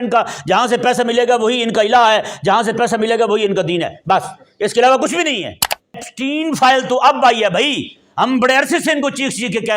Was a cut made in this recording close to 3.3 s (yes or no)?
no